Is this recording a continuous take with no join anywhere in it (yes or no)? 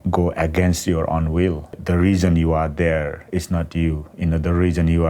no